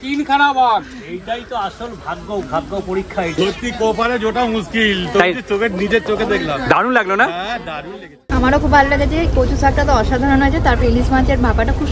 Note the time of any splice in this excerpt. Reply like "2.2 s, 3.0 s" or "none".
3.3 s, 8.2 s